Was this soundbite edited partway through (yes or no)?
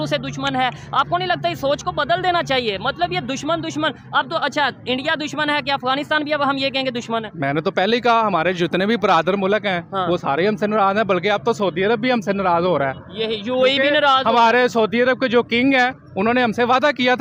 no